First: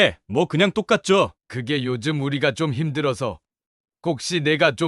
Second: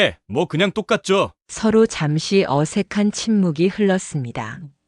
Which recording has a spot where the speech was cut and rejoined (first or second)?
first